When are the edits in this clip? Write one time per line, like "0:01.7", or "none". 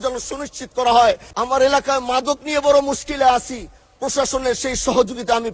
0:01.6